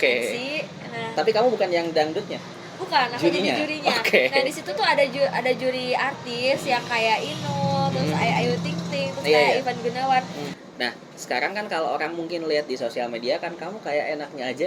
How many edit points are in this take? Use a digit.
1